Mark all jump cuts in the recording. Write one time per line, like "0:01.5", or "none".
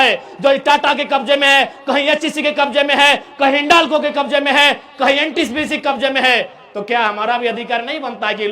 none